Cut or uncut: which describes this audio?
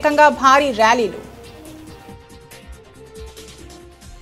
cut